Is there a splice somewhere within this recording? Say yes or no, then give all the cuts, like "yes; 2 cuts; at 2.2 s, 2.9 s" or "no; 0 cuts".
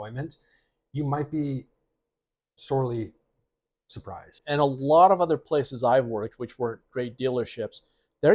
yes; 1 cut; at 4.4 s